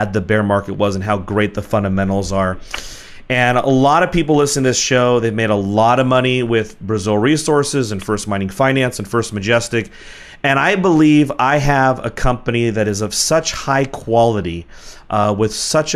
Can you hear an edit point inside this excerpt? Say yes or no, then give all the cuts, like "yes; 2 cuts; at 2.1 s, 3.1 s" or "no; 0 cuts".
yes; 1 cut; at 6.4 s